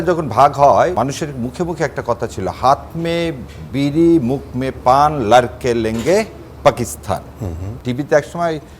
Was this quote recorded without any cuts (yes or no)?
no